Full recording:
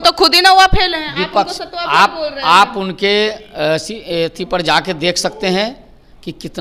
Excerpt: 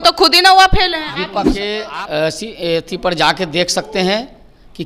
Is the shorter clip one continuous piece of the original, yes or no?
no